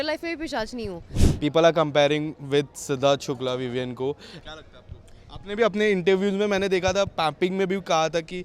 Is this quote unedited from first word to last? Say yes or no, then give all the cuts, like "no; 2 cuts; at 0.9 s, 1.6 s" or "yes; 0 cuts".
no; 2 cuts; at 1.2 s, 4.4 s